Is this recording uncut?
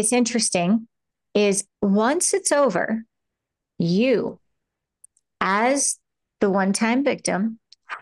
no; 1 cut; at 1.7 s

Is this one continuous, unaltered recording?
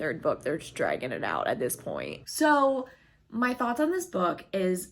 no; 1 cut; at 2.2 s

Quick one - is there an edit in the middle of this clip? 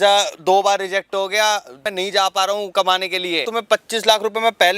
yes; 2 cuts; at 1.8 s, 3.5 s

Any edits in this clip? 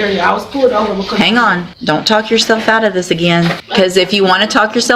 yes; 2 cuts; at 1.7 s, 3.6 s

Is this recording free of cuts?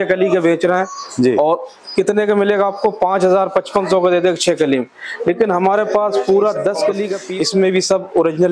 no; 1 cut; at 7.2 s

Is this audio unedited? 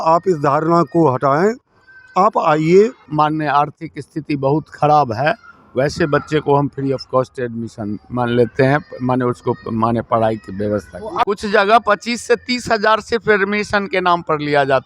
no; 2 cuts; at 3.0 s, 11.2 s

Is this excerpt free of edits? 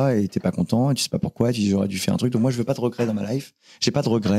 yes; 0 cuts

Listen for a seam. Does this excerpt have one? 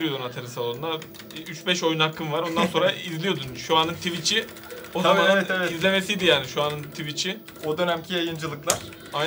no; 0 cuts

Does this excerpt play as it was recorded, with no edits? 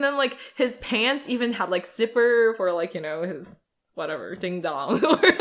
yes; 0 cuts

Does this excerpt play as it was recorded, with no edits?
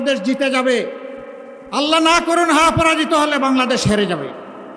yes; 0 cuts

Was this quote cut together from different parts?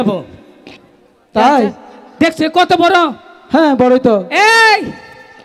no; 0 cuts

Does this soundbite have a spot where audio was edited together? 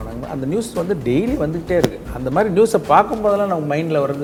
no; 0 cuts

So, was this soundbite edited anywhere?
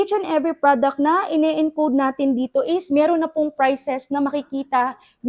no; 0 cuts

